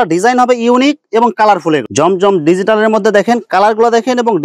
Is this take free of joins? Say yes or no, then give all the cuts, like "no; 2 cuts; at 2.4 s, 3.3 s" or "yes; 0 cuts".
no; 1 cut; at 1.9 s